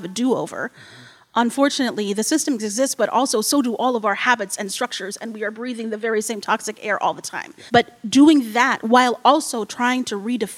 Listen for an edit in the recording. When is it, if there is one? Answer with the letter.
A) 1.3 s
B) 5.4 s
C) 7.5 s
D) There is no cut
C